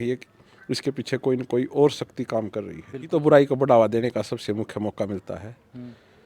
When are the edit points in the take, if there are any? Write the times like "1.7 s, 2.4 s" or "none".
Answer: 3.1 s